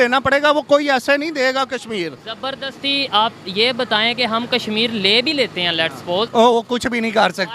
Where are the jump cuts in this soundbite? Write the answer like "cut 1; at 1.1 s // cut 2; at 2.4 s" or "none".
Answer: cut 1; at 6.3 s

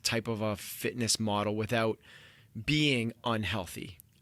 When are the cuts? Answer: none

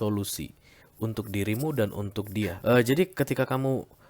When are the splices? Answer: cut 1; at 2.6 s

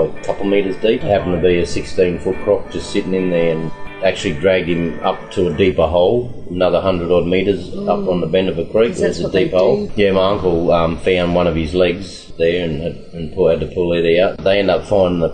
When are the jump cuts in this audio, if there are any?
cut 1; at 1.0 s // cut 2; at 3.7 s // cut 3; at 9.9 s // cut 4; at 12.2 s // cut 5; at 14.4 s

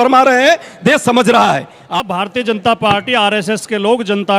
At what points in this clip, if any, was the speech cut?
cut 1; at 2.0 s

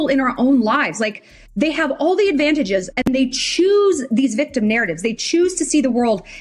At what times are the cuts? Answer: none

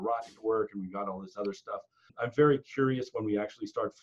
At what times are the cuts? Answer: cut 1; at 2.1 s

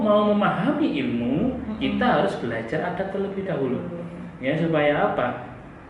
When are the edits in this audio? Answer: none

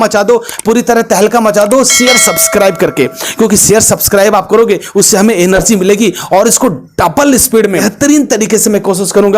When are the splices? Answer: cut 1; at 7.9 s

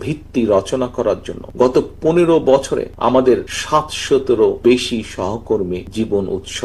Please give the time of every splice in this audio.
cut 1; at 1.4 s // cut 2; at 2.9 s // cut 3; at 3.5 s // cut 4; at 4.6 s // cut 5; at 5.9 s

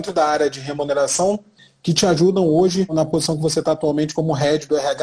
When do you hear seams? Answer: cut 1; at 1.6 s // cut 2; at 2.9 s

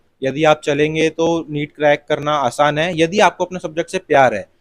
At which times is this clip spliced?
none

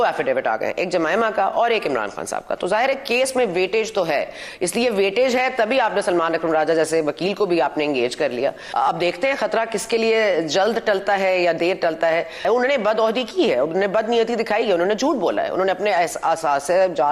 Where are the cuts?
cut 1; at 8.6 s // cut 2; at 12.4 s

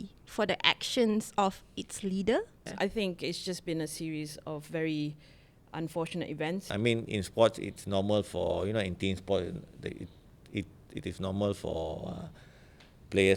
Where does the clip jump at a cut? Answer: cut 1; at 2.7 s // cut 2; at 6.7 s

